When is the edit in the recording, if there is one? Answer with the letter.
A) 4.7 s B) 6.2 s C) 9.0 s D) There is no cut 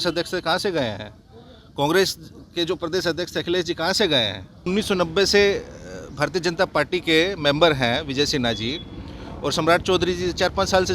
A